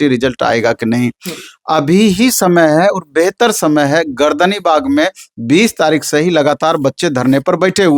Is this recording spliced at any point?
no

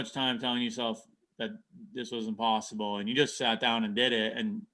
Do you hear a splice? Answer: no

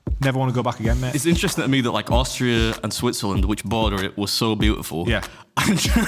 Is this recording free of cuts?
no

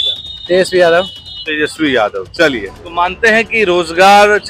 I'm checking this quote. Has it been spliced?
yes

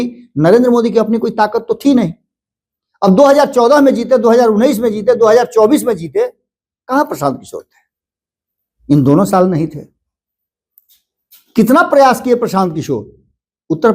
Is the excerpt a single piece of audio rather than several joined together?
yes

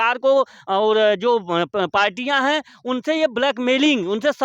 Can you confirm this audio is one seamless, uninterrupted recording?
yes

